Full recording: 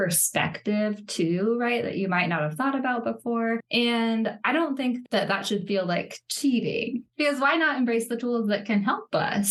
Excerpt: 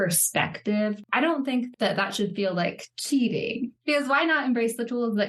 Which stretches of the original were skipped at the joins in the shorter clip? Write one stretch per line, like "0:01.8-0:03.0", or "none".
0:01.1-0:04.4